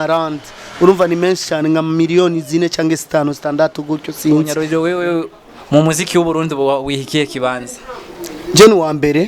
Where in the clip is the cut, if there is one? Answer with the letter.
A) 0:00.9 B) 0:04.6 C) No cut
B